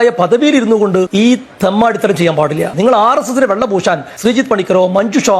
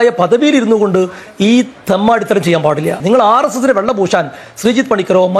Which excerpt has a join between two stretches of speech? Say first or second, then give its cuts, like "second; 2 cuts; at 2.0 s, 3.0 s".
first; 2 cuts; at 1.1 s, 4.1 s